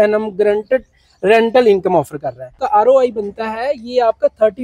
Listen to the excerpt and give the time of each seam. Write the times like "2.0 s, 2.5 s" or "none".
2.6 s